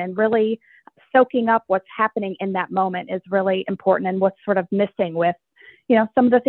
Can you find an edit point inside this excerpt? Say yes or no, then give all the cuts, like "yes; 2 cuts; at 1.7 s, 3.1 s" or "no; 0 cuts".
no; 0 cuts